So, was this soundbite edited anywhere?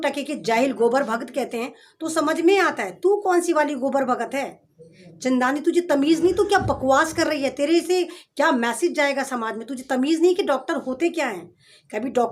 no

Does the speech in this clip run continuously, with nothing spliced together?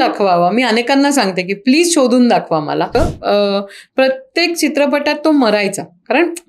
no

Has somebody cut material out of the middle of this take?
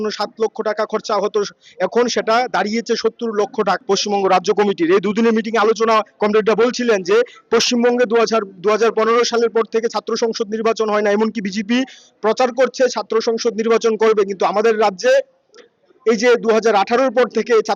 yes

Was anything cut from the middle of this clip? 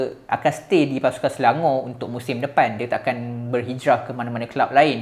no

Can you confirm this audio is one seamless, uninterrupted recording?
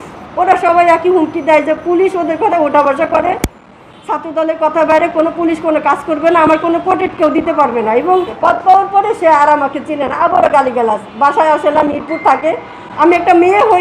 no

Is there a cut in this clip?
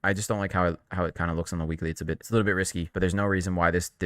yes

